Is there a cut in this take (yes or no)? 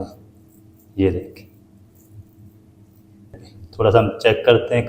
yes